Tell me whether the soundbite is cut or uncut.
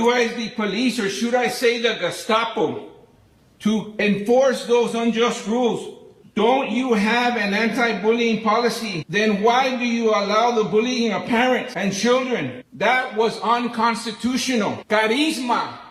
uncut